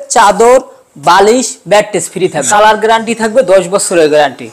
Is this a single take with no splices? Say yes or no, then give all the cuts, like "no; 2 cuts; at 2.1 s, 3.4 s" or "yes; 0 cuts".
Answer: no; 1 cut; at 2.5 s